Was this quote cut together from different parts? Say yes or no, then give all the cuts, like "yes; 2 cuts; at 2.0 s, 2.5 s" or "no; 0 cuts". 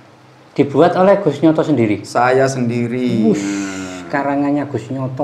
no; 0 cuts